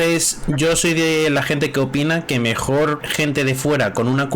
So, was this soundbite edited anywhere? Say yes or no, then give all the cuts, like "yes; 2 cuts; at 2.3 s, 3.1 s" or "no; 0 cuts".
yes; 1 cut; at 3.1 s